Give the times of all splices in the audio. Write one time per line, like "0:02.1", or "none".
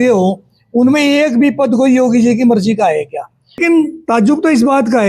0:03.6